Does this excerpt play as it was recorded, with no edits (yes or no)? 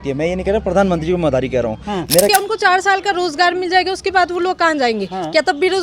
no